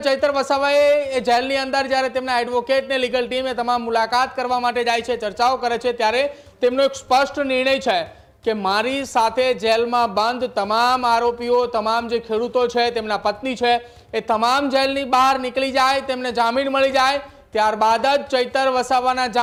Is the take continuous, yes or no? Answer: yes